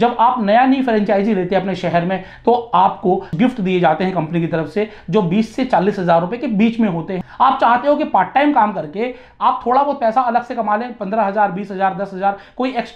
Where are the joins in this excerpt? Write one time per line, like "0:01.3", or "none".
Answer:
0:03.3
0:07.1